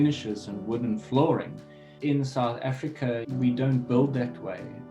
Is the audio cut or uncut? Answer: cut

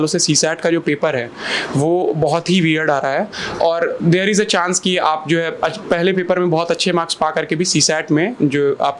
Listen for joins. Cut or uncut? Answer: uncut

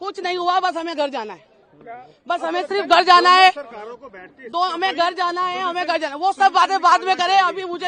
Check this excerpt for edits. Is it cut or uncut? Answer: uncut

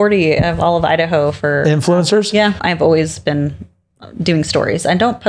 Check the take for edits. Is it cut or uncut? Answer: cut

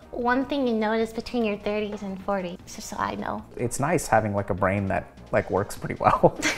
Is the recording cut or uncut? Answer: cut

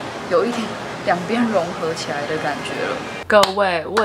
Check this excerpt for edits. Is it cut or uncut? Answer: cut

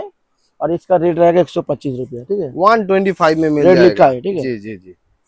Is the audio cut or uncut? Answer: uncut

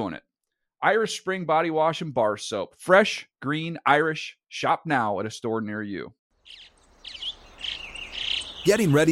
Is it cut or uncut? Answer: cut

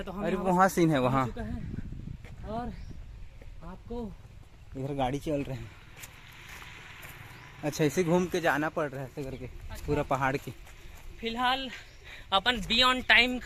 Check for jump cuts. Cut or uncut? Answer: uncut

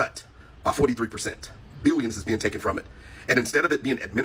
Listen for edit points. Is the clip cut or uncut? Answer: uncut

